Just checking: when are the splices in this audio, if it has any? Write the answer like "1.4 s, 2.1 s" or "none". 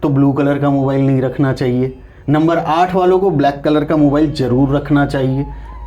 none